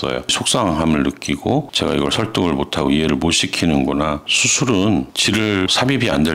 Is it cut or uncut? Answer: cut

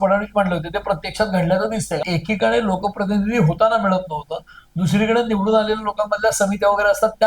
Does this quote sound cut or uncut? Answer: cut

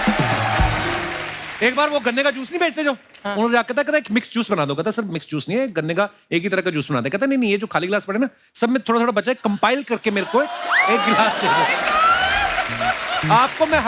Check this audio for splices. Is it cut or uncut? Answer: uncut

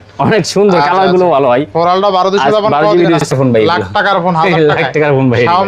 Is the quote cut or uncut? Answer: cut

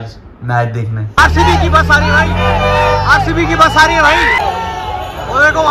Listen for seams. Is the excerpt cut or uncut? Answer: cut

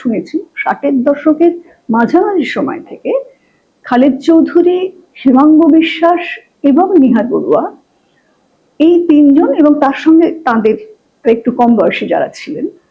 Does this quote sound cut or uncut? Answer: uncut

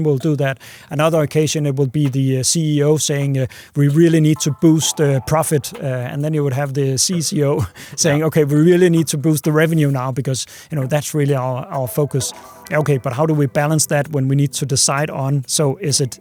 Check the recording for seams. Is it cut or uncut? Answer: uncut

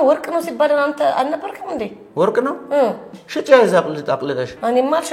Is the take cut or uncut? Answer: uncut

